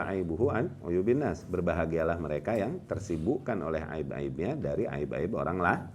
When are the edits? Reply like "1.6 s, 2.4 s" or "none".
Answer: none